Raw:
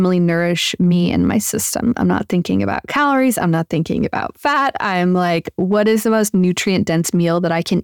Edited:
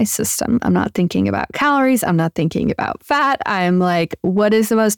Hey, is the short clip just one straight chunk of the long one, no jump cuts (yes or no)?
yes